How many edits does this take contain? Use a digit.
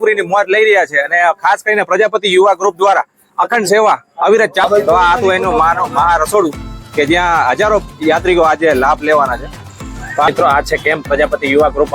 2